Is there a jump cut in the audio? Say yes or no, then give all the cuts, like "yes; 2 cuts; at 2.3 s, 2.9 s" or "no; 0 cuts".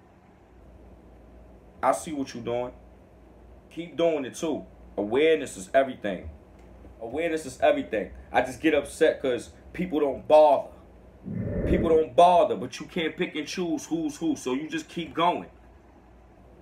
yes; 2 cuts; at 3.9 s, 7.1 s